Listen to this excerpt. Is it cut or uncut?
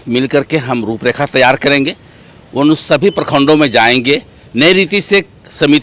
uncut